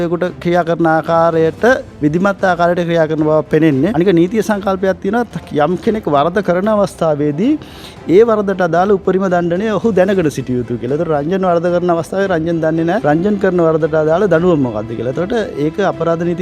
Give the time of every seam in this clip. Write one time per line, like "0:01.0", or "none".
0:03.9
0:13.0